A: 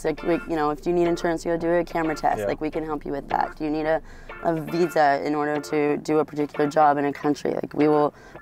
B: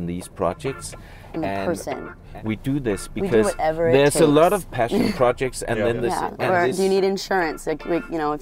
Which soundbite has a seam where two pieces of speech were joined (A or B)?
B